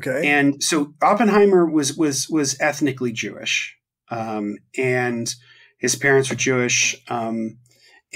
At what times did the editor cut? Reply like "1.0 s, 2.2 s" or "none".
none